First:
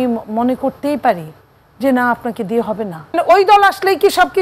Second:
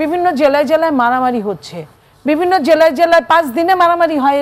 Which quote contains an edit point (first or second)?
first